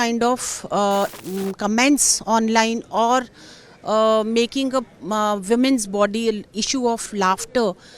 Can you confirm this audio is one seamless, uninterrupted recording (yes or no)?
no